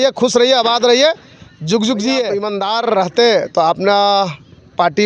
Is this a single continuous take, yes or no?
no